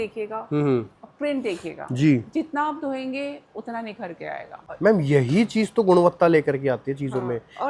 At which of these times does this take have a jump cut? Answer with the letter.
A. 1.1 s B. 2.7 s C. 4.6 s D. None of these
C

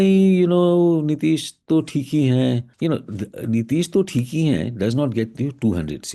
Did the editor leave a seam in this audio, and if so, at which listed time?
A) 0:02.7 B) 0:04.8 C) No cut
A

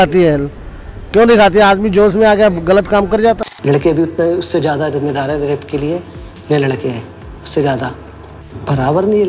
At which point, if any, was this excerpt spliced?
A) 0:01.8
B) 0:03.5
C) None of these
B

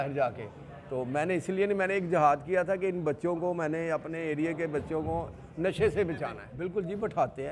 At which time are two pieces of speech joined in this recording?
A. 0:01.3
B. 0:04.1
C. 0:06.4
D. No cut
C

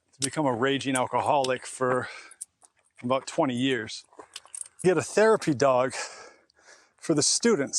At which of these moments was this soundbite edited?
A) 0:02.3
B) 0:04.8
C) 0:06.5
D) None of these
B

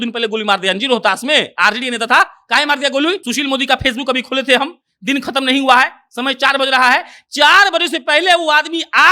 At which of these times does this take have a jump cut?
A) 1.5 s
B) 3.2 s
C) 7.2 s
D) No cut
B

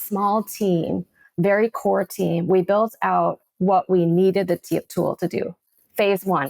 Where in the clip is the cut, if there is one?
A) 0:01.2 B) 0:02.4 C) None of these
C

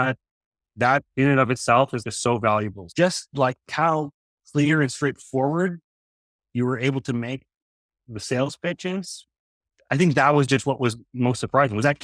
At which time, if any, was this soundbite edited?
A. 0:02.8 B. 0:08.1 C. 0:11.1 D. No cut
A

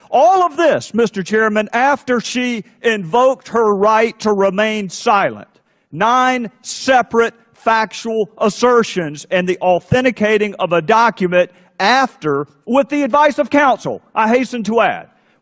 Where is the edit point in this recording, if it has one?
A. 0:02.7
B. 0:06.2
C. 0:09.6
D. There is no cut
B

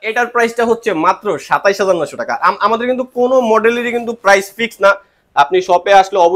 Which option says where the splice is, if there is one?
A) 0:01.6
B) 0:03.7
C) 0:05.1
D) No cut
D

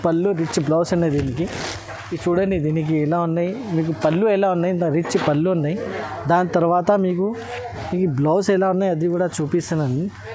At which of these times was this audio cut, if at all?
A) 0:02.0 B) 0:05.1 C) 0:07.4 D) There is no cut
D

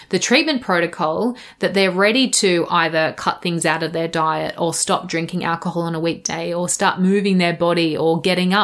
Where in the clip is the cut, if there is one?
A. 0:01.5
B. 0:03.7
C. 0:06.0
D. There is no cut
D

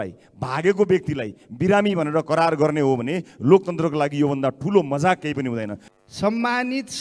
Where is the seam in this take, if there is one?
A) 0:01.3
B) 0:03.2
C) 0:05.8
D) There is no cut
C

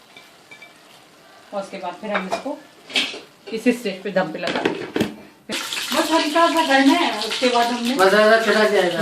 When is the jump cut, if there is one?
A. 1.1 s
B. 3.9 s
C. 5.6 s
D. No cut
C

